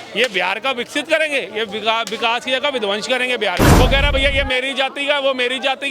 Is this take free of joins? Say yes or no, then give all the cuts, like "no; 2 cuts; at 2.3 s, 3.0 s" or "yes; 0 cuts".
no; 1 cut; at 3.7 s